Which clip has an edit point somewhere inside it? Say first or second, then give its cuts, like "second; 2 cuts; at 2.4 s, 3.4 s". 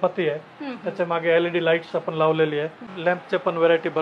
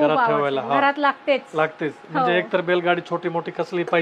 first; 1 cut; at 2.9 s